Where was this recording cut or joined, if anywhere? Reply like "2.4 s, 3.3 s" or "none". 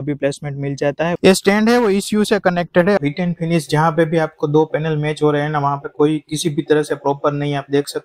1.1 s, 3.0 s